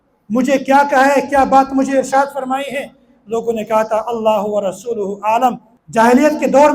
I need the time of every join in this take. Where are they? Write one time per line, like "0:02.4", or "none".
0:05.7